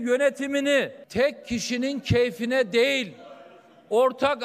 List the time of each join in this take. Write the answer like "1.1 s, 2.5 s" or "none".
1.0 s